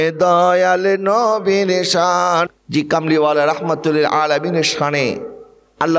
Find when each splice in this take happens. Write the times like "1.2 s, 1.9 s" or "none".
2.6 s